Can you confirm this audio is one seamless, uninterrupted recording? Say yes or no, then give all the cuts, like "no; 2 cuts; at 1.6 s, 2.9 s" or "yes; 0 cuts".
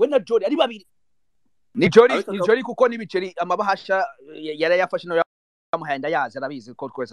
no; 1 cut; at 1.6 s